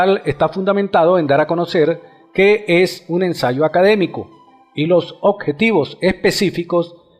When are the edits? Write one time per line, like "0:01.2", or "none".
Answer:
0:06.3